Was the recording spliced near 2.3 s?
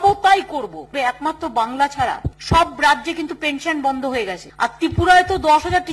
yes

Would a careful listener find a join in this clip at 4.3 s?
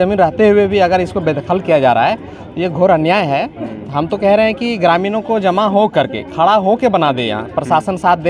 no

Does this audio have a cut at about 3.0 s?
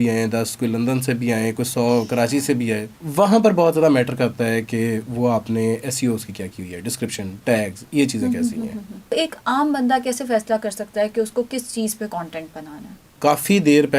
yes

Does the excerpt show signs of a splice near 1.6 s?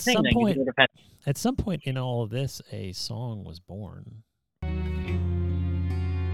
no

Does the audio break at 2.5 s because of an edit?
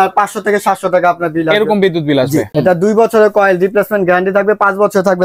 yes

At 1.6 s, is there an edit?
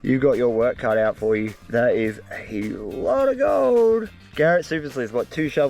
no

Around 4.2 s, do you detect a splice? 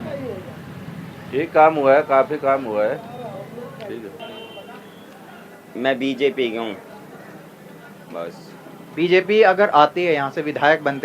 yes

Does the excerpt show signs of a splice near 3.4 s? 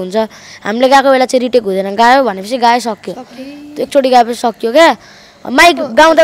no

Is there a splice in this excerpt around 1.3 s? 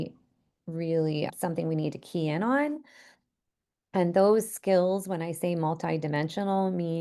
yes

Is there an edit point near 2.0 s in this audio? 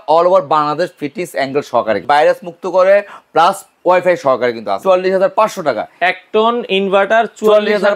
yes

